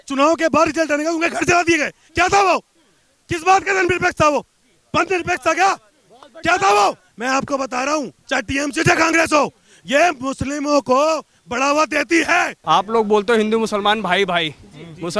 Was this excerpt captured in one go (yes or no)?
no